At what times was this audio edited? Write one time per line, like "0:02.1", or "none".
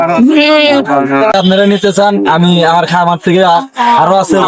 0:01.3